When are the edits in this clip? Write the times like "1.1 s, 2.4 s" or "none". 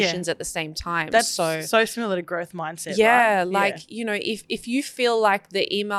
none